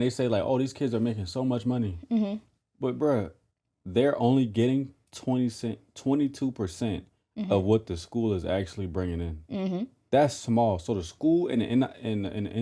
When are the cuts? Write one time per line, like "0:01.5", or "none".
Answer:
none